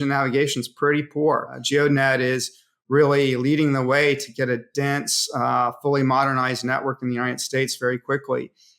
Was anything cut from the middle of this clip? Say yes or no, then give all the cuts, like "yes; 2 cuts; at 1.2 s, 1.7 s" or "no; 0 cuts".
yes; 1 cut; at 1.6 s